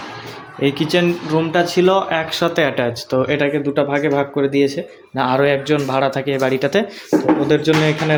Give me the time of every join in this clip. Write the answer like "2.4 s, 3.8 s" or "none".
none